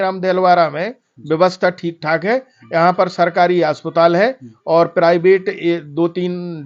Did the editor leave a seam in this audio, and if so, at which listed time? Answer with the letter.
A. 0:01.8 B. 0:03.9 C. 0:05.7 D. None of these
D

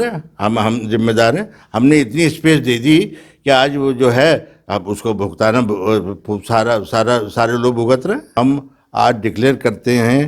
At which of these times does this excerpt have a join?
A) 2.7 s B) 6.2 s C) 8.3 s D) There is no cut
C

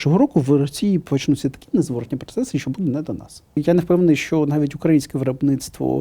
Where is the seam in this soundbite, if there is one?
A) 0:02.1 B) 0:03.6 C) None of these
B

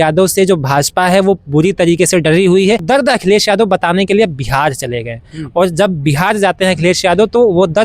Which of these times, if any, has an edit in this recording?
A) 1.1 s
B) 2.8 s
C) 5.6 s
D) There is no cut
B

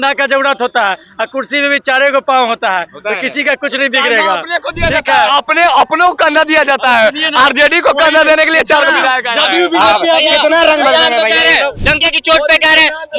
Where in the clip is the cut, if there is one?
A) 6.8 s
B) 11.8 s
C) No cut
B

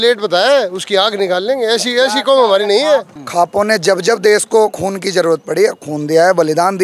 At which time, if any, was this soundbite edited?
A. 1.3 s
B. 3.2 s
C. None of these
B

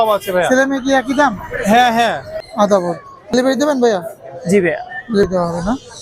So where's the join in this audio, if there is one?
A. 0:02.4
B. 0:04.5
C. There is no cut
A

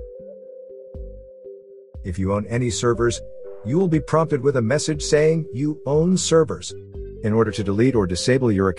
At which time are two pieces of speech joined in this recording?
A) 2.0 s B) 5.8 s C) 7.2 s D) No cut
A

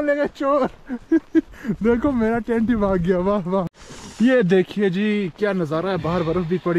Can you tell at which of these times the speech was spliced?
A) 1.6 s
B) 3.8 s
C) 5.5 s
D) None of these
B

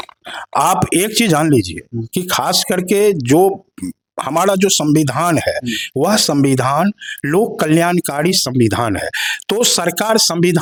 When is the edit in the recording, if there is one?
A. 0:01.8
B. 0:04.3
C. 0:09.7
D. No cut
D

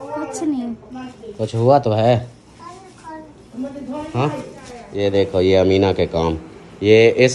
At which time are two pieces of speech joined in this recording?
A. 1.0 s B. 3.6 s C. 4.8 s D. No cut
C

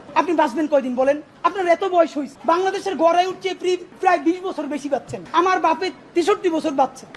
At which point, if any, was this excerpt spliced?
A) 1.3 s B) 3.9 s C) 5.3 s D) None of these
D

